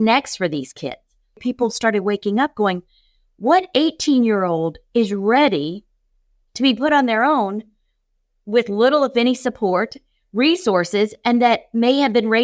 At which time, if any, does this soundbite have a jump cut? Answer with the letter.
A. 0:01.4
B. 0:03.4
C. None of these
A